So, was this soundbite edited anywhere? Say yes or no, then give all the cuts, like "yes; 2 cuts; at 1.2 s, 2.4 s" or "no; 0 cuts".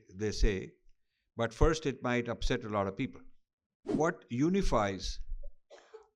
yes; 1 cut; at 3.8 s